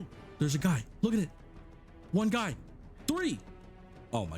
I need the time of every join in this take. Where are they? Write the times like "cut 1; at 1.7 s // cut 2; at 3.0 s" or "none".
none